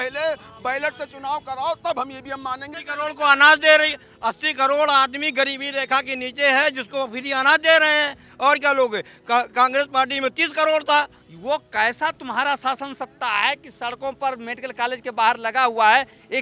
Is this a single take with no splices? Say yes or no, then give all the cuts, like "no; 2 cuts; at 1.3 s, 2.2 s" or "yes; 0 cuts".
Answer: no; 2 cuts; at 2.7 s, 11.2 s